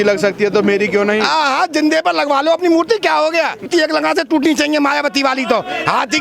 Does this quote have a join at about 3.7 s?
yes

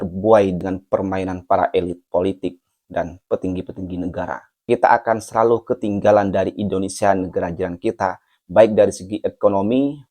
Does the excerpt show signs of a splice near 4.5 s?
yes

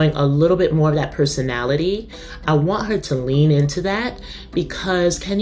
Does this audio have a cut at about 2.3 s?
yes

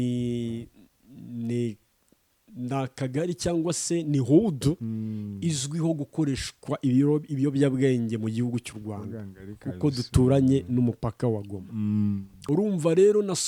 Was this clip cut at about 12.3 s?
yes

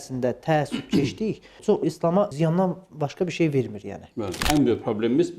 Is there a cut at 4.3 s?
yes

